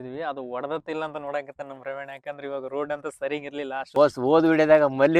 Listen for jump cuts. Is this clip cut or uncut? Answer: cut